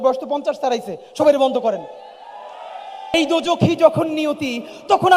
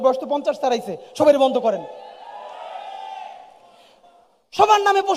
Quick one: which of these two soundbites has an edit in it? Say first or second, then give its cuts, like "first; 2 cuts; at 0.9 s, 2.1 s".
first; 1 cut; at 3.1 s